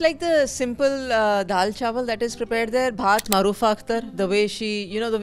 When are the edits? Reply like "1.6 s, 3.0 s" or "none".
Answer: 3.3 s